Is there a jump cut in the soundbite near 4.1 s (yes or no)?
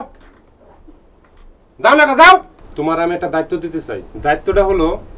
no